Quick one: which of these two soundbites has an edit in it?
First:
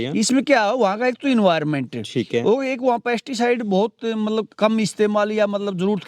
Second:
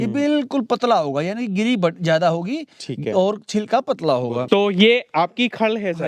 second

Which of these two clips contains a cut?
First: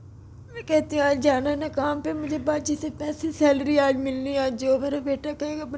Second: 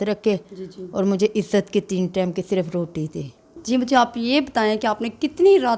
second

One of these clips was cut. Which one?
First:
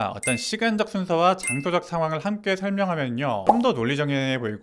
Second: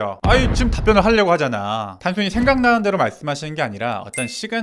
second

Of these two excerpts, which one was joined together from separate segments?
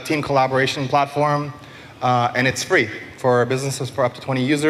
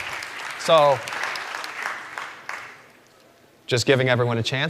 second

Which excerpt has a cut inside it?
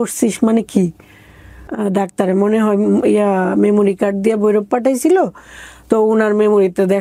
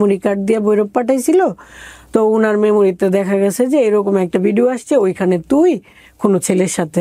first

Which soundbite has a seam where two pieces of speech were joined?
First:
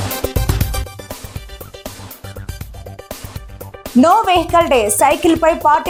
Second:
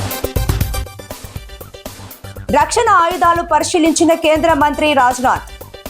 second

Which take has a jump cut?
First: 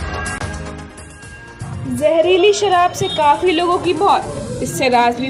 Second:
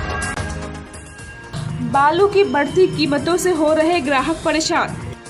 second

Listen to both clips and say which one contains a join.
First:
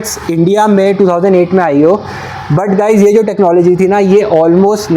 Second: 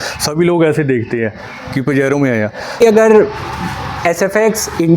second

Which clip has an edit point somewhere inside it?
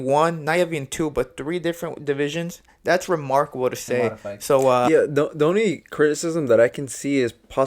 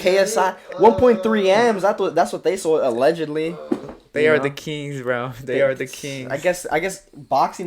first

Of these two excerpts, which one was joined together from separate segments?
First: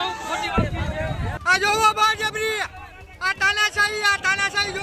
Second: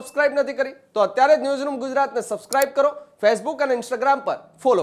first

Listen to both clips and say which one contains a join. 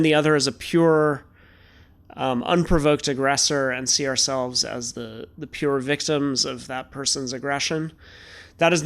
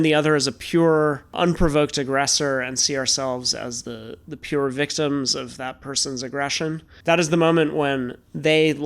second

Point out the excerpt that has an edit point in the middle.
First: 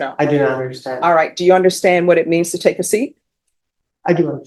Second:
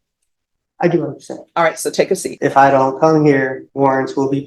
second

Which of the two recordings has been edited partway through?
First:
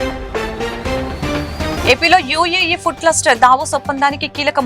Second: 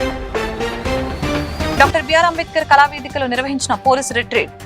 second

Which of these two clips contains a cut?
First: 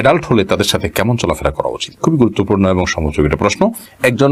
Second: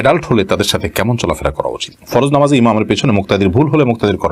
second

